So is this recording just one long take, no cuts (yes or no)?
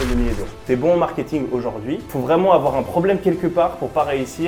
no